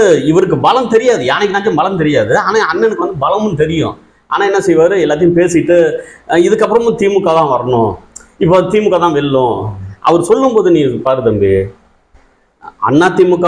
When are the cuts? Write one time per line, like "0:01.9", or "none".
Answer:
none